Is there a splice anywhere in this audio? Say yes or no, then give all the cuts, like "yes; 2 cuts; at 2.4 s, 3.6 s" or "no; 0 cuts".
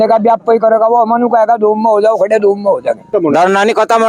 yes; 1 cut; at 3.1 s